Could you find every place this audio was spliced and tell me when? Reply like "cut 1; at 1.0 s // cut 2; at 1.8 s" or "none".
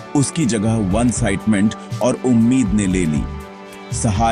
none

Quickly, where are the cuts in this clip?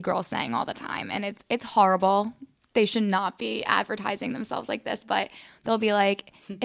none

